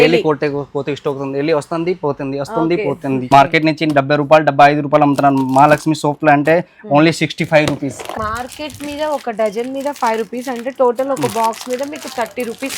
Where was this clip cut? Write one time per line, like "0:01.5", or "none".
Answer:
0:03.2
0:08.1